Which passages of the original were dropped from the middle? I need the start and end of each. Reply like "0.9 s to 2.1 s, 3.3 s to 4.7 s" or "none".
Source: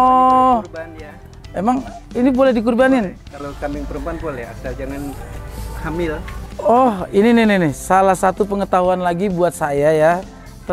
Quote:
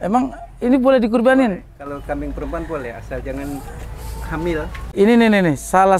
6.4 s to 7.0 s